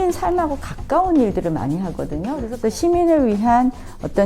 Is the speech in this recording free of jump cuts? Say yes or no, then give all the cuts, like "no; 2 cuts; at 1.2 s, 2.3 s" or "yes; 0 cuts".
no; 1 cut; at 2.4 s